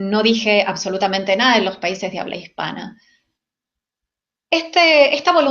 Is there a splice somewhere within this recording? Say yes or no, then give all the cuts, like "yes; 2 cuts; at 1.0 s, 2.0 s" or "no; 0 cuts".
yes; 1 cut; at 2.4 s